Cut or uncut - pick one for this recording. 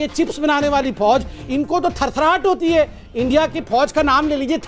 uncut